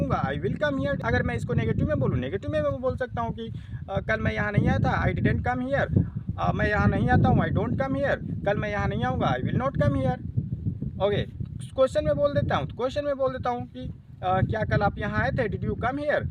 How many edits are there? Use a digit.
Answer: 1